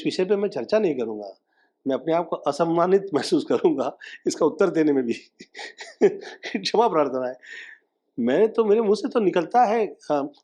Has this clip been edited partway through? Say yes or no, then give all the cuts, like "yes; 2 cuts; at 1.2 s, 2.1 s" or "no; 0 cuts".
no; 0 cuts